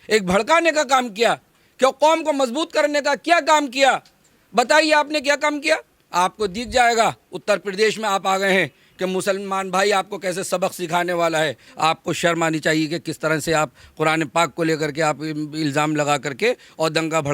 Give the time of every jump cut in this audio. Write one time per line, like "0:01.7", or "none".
0:05.9
0:11.7